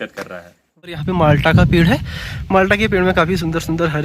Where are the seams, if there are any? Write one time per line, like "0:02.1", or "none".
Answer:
0:01.0